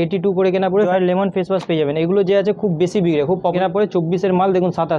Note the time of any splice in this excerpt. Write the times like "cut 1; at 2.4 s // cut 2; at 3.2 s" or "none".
cut 1; at 0.9 s // cut 2; at 3.5 s